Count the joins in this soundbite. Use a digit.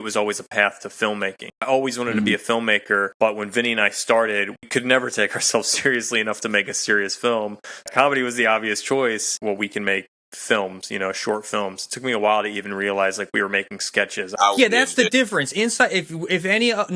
6